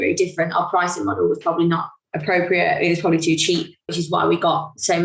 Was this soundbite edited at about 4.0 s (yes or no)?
yes